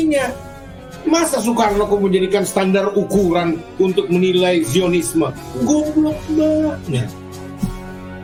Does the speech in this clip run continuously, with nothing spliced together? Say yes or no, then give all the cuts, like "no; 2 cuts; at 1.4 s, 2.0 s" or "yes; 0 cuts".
yes; 0 cuts